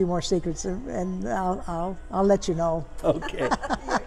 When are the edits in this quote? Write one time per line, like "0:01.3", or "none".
none

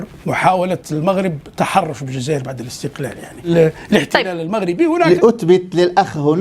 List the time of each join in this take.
0:03.5
0:05.1

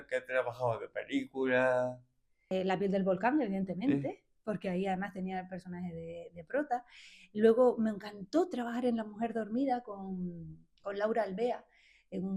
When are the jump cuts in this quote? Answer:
0:02.4

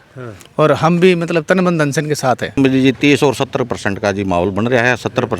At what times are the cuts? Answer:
0:02.6

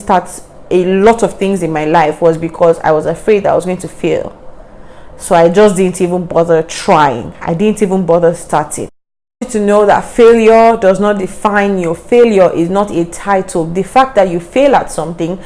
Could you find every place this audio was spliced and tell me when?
0:09.5

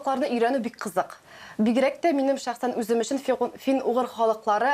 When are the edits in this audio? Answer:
none

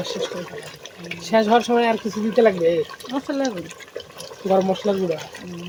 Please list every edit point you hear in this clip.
none

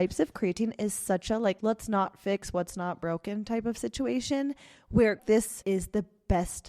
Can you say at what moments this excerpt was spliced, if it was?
0:05.3

